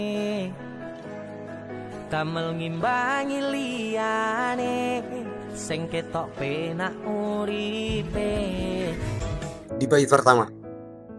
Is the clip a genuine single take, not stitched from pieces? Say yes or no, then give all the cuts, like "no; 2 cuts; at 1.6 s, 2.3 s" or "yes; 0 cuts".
no; 1 cut; at 9.4 s